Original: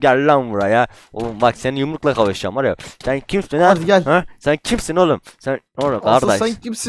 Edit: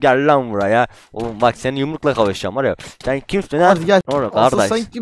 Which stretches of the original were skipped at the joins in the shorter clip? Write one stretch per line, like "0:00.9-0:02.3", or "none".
0:04.0-0:05.7